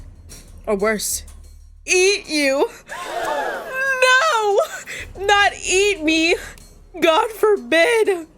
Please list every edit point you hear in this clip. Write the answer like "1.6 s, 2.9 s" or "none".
none